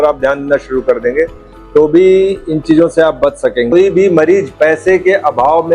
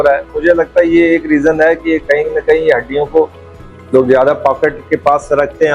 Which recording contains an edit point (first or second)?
first